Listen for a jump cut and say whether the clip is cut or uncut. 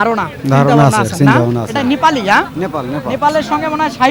uncut